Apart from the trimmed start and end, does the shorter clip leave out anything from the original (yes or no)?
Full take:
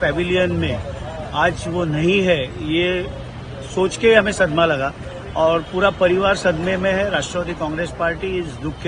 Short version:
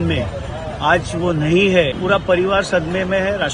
yes